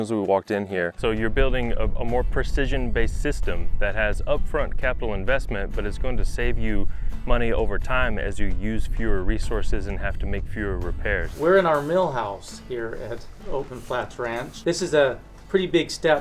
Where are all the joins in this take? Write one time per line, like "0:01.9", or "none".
0:01.0
0:11.3
0:14.5